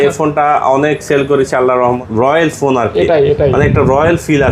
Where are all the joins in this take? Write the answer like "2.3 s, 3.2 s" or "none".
2.0 s

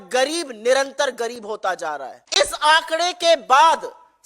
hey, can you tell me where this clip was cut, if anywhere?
2.2 s

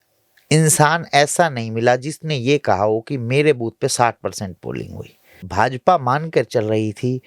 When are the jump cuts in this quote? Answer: 5.4 s

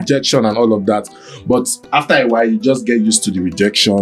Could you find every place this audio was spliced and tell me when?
none

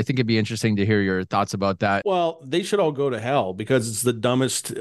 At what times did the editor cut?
2.0 s

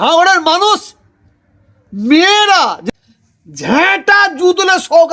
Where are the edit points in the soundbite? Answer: 2.8 s

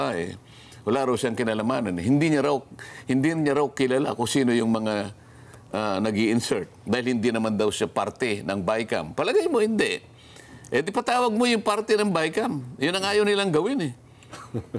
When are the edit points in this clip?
none

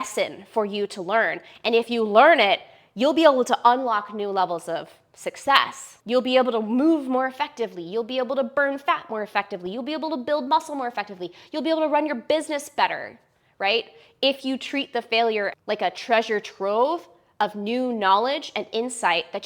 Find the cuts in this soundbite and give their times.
15.5 s

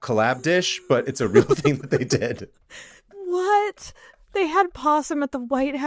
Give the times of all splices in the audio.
none

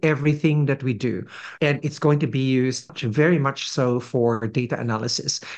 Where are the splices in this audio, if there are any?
1.4 s, 3.0 s

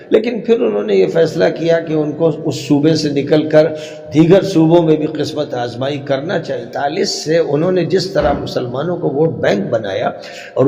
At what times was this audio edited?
6.6 s

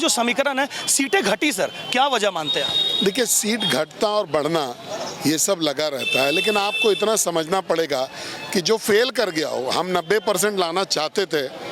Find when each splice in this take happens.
none

